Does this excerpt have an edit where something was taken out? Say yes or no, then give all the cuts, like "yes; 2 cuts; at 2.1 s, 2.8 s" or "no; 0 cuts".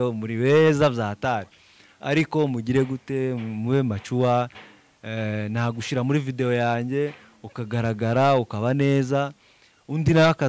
no; 0 cuts